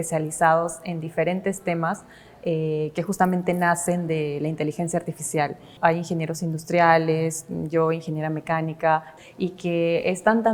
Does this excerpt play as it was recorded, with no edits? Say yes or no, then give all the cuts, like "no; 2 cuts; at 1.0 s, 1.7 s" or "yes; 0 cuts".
no; 2 cuts; at 5.7 s, 9.1 s